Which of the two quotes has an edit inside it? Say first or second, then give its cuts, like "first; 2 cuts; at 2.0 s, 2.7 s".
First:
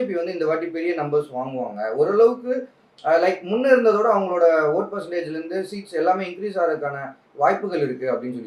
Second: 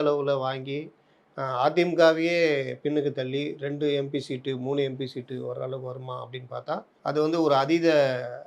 second; 1 cut; at 6.9 s